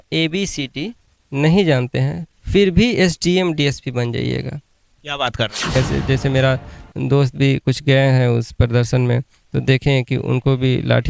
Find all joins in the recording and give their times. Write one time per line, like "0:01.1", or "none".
0:05.7